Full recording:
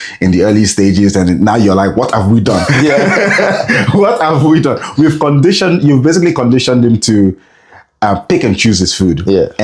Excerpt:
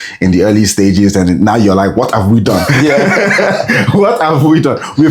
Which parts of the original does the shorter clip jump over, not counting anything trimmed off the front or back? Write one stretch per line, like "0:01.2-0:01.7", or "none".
none